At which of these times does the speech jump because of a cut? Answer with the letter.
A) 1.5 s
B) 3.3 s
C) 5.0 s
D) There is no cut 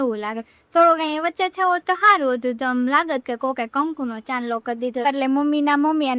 C